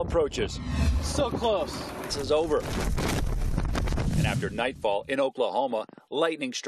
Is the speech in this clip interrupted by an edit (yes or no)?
no